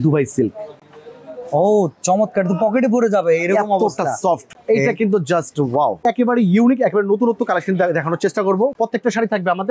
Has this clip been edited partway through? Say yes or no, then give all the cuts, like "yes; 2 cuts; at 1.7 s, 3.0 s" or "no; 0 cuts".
yes; 3 cuts; at 4.5 s, 6.0 s, 8.7 s